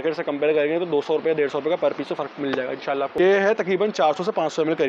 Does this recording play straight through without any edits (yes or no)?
no